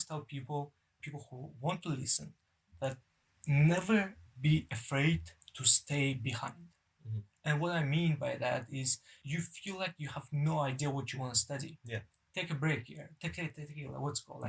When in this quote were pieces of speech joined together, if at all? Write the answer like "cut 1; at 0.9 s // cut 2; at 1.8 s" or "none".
cut 1; at 1.0 s // cut 2; at 3.0 s // cut 3; at 9.1 s